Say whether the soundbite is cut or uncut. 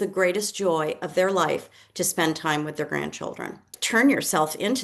cut